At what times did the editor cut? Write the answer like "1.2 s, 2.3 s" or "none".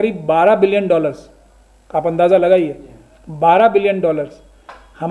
none